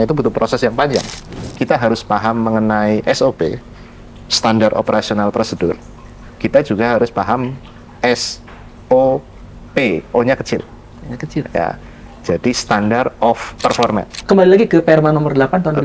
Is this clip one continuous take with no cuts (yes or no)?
no